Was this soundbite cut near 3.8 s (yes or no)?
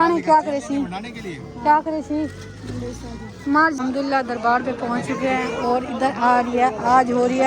yes